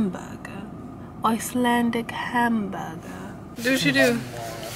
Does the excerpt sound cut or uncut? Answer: cut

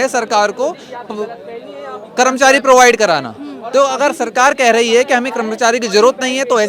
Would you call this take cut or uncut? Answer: uncut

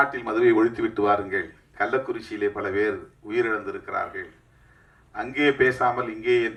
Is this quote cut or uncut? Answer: uncut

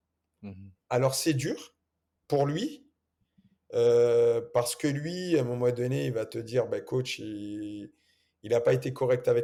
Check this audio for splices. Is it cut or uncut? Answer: uncut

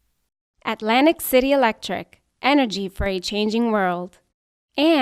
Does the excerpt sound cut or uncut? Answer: uncut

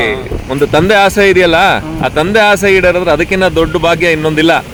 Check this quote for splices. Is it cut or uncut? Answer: uncut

